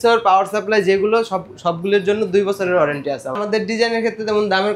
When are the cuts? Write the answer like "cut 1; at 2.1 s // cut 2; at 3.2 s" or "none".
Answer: cut 1; at 3.4 s